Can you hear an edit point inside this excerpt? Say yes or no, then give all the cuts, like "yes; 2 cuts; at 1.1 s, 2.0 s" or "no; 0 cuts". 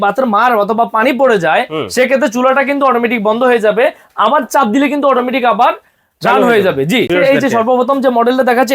yes; 1 cut; at 7.1 s